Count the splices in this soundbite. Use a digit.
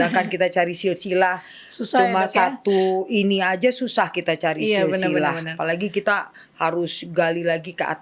0